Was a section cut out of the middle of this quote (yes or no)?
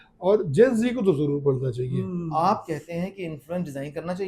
yes